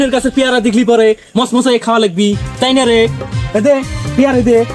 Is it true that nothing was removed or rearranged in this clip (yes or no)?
yes